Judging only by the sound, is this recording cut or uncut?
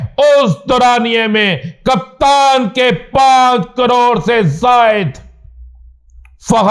uncut